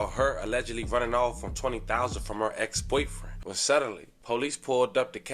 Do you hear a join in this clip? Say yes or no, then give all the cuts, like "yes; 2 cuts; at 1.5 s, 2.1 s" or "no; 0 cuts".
yes; 1 cut; at 3.3 s